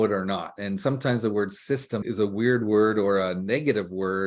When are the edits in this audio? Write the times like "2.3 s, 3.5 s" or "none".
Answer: 2.0 s